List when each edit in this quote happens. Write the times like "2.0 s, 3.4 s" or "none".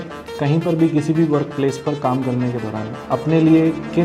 3.0 s